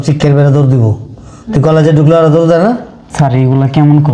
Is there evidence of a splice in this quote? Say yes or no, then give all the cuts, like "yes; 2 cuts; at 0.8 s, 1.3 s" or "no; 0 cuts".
yes; 1 cut; at 3.0 s